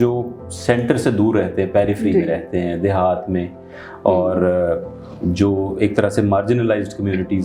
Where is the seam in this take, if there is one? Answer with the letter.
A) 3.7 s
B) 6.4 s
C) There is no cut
C